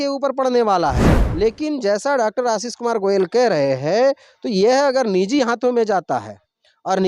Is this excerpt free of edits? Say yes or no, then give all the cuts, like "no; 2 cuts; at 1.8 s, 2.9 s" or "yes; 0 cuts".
no; 1 cut; at 1.2 s